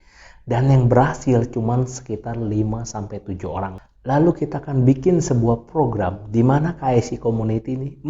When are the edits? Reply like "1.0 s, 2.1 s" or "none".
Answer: 3.7 s

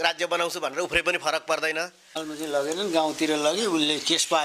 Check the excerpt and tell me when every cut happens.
2.1 s

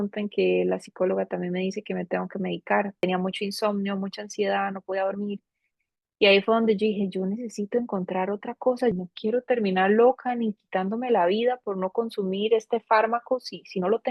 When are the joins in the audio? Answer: 3.0 s, 8.9 s

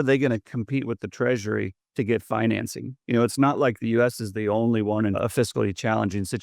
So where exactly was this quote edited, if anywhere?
5.2 s

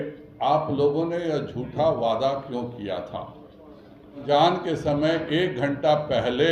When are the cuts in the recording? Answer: 4.2 s

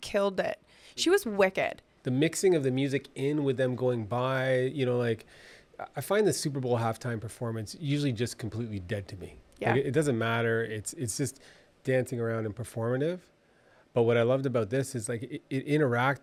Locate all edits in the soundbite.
none

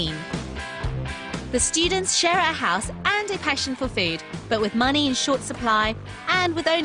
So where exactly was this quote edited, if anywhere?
4.8 s

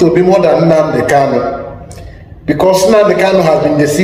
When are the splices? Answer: none

